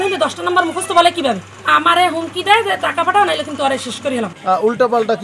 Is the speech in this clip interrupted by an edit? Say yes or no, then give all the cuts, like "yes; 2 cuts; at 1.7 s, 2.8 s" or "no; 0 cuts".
yes; 2 cuts; at 1.5 s, 4.4 s